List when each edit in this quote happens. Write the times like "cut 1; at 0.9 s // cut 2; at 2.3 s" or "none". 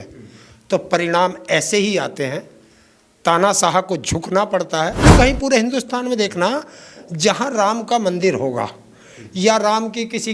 cut 1; at 5.0 s